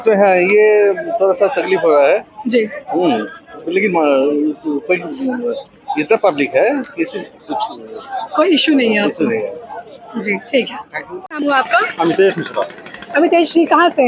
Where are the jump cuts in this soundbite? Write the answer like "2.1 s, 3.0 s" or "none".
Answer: none